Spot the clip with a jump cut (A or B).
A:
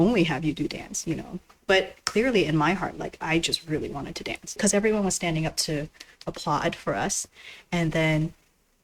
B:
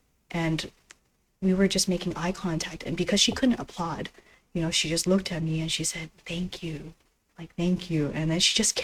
A